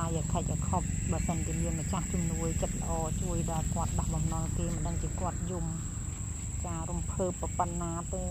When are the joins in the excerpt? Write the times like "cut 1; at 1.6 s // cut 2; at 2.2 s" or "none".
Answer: none